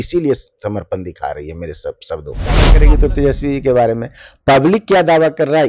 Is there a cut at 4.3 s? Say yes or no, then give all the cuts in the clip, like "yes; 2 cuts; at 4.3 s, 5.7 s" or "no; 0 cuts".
no; 1 cut; at 2.7 s